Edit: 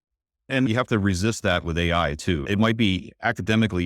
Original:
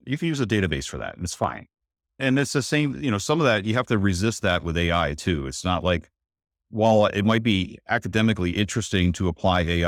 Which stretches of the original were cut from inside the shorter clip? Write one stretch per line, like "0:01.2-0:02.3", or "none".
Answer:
0:02.4-0:03.7
0:05.5-0:07.1